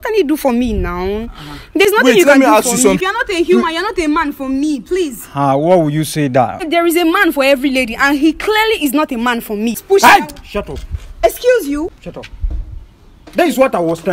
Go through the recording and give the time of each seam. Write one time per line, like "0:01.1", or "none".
0:03.1
0:06.7
0:09.8
0:12.0